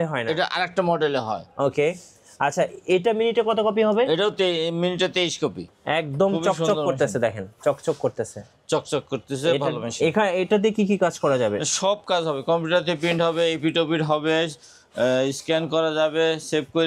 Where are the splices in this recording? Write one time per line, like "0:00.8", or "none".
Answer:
0:05.6